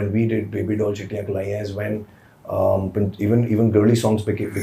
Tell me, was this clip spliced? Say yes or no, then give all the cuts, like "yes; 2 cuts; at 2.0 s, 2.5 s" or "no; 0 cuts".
no; 0 cuts